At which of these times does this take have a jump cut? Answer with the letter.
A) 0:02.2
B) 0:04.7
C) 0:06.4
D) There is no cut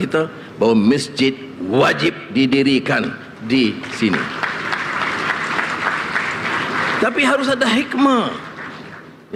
D